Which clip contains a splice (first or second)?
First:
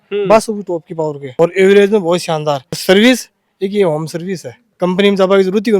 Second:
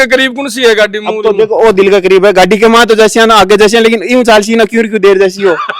first